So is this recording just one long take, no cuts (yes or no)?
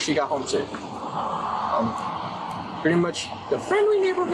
yes